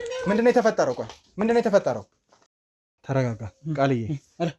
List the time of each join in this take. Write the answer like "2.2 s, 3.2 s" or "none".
none

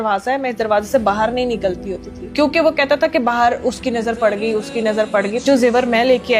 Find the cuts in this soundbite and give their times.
2.2 s, 5.4 s

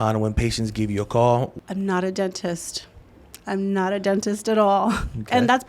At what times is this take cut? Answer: 1.5 s

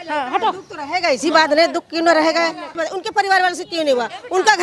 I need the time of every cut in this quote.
2.7 s

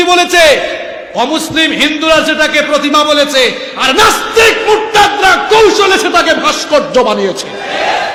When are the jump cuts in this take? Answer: none

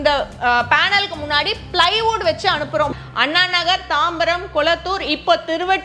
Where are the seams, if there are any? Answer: 2.9 s

